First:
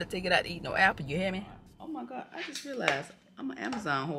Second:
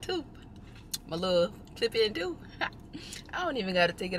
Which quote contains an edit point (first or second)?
first